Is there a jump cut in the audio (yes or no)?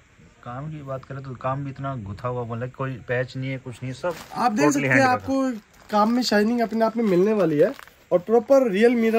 no